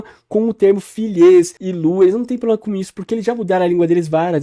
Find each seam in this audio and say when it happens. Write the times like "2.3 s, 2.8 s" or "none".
1.6 s

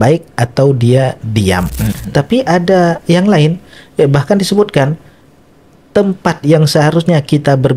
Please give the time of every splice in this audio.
2.0 s

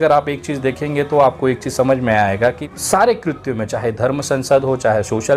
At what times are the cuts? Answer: 2.7 s

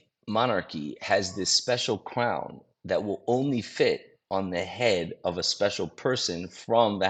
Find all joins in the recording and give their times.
none

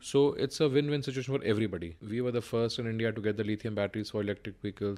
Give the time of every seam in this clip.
2.0 s

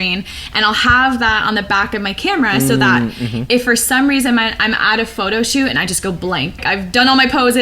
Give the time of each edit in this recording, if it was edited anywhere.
6.6 s

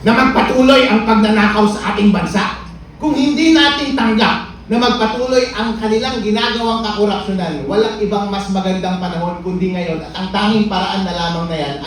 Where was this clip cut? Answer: none

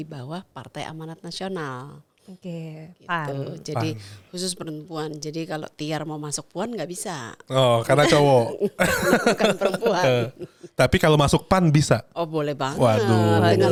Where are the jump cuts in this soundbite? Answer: none

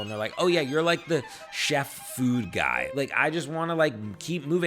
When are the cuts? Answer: 2.9 s

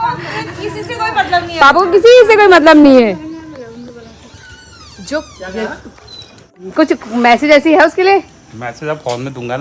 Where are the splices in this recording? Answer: 6.6 s

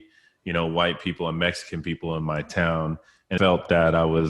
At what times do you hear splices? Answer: 3.4 s

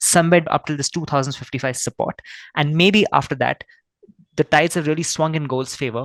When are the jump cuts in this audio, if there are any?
none

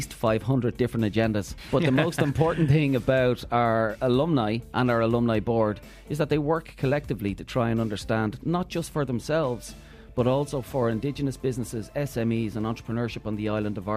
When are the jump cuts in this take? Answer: 1.5 s

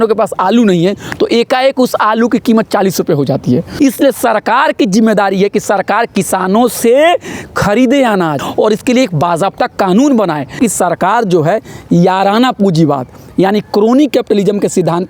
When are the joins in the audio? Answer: 3.7 s, 8.4 s, 10.5 s

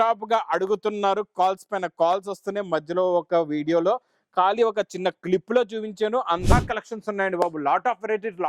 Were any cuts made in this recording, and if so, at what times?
6.5 s

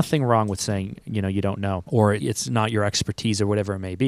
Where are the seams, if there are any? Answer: 2.1 s

